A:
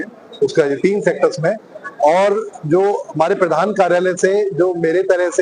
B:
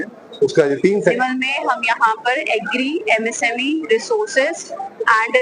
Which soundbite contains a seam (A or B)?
B